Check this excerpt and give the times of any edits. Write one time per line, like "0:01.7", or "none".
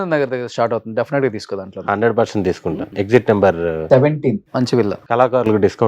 0:02.9
0:05.0